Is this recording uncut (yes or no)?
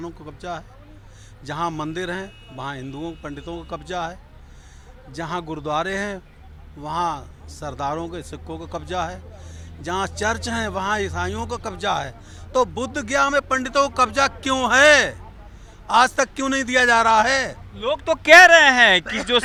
yes